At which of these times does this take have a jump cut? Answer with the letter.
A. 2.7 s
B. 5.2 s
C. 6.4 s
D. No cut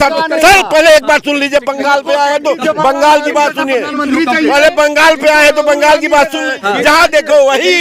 C